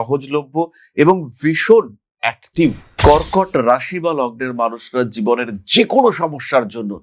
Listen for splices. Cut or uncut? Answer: cut